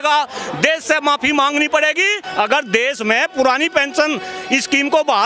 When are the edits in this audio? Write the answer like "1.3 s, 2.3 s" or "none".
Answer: 2.2 s